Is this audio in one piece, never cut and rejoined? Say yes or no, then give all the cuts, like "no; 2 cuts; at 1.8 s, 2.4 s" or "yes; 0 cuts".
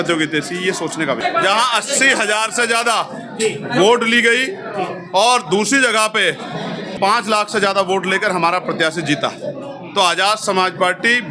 no; 2 cuts; at 1.2 s, 6.9 s